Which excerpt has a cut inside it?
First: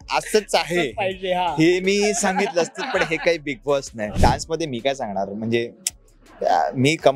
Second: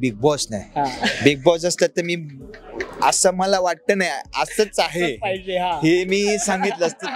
first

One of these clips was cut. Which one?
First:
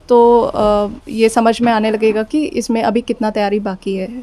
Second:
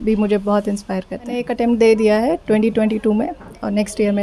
second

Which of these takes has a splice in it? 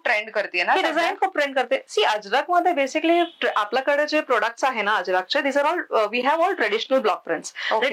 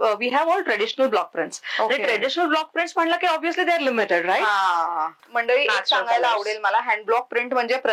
second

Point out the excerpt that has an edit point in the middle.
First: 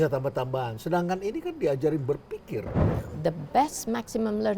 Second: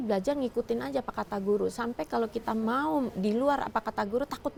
first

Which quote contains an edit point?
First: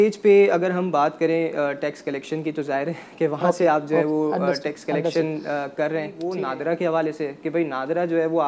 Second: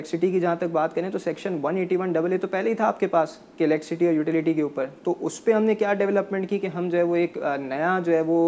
first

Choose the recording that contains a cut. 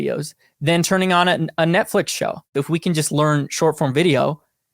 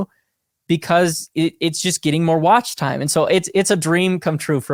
first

